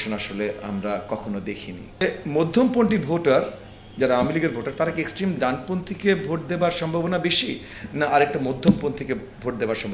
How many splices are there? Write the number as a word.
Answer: one